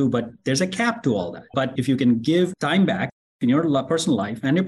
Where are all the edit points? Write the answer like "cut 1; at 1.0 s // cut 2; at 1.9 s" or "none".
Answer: cut 1; at 1.5 s